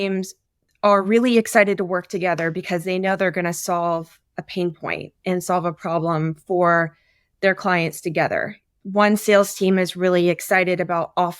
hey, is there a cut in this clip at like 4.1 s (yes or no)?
no